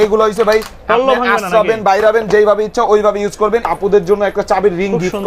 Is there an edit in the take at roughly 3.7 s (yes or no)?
yes